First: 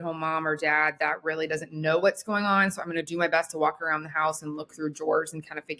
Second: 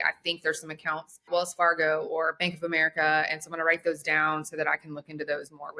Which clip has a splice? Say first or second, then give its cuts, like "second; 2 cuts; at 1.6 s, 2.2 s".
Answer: second; 1 cut; at 1.3 s